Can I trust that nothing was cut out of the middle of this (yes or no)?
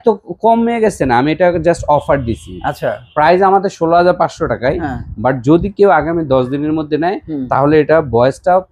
yes